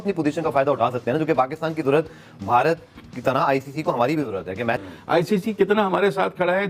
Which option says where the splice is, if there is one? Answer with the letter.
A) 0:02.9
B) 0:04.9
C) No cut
B